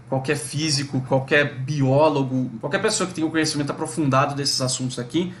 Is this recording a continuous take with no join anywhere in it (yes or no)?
no